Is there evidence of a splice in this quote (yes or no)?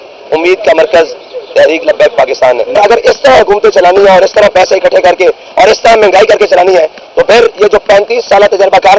no